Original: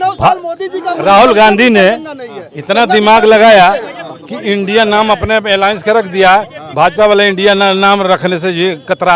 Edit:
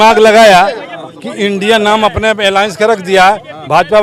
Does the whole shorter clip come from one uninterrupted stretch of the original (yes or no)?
yes